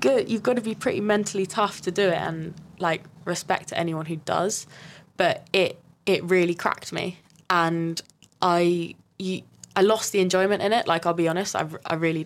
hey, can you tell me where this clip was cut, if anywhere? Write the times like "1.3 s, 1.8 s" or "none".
none